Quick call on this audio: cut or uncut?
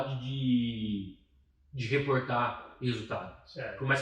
uncut